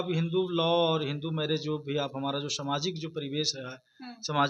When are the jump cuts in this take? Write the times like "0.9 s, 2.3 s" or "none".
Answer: none